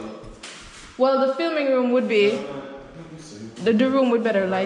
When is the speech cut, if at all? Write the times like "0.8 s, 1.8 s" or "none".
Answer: none